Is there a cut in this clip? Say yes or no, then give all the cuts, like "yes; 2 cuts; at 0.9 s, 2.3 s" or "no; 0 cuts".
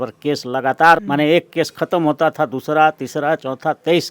yes; 1 cut; at 1.1 s